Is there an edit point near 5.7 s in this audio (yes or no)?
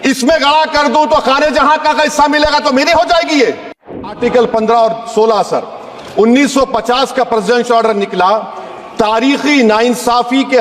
no